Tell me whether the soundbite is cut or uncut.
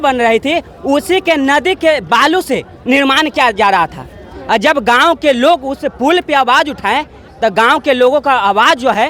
uncut